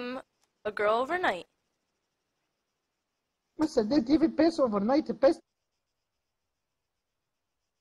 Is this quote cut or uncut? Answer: uncut